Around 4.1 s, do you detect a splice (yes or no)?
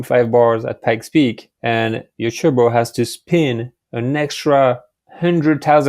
no